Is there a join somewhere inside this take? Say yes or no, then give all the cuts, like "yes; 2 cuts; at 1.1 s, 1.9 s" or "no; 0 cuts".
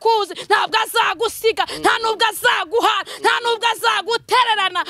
no; 0 cuts